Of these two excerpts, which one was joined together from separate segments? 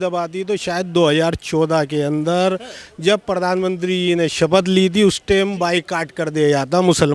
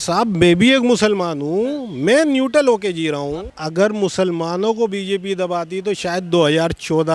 second; 1 cut; at 3.4 s

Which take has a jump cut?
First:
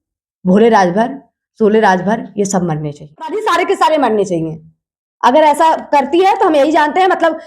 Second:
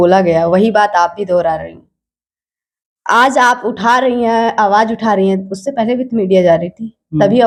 first; 1 cut; at 3.4 s

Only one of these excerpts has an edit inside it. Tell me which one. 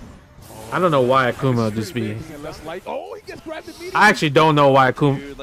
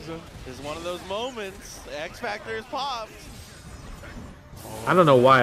first; 1 cut; at 2.3 s

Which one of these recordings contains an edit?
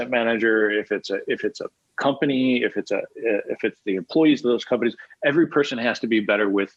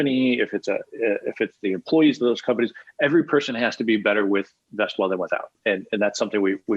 second; 1 cut; at 5.5 s

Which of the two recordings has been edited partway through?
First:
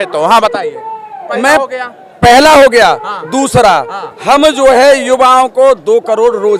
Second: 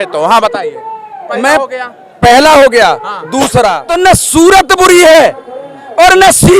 second; 1 cut; at 3.9 s

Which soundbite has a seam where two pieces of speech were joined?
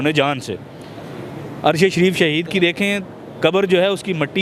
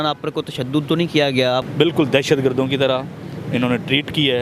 second; 1 cut; at 1.7 s

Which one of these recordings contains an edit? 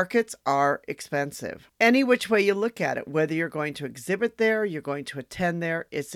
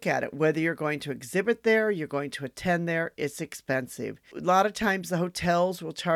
second; 1 cut; at 4.4 s

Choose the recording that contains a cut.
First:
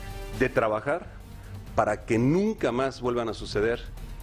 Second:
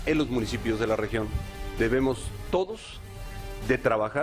second; 1 cut; at 1.4 s

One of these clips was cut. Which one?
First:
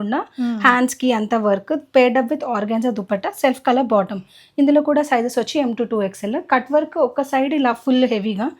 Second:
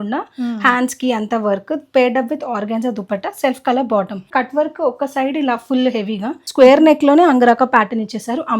second; 2 cuts; at 4.2 s, 6.4 s

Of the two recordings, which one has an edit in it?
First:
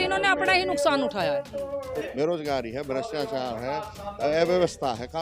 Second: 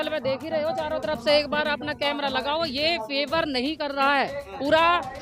first; 1 cut; at 2.0 s

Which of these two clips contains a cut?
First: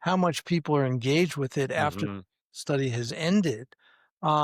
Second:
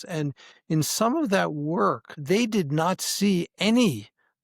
second; 1 cut; at 2.2 s

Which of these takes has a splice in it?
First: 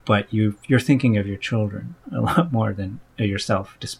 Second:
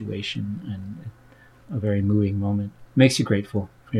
second; 2 cuts; at 1.6 s, 2.8 s

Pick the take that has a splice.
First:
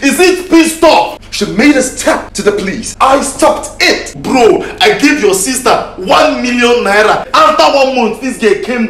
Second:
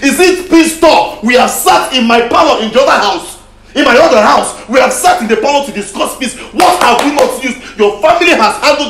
first; 4 cuts; at 1.2 s, 2.6 s, 4.2 s, 7.3 s

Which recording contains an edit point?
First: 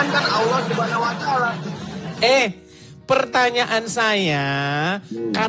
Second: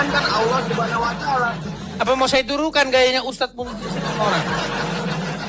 second; 1 cut; at 1.9 s

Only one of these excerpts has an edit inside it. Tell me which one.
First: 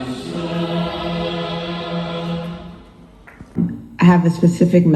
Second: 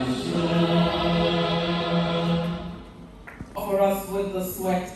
first; 1 cut; at 3.6 s

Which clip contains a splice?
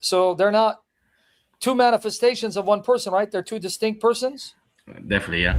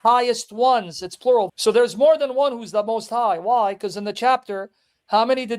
second; 1 cut; at 1.5 s

